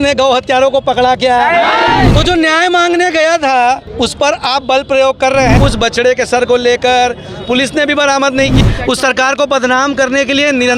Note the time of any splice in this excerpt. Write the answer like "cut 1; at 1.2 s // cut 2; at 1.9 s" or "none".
cut 1; at 2.1 s // cut 2; at 5.5 s // cut 3; at 8.6 s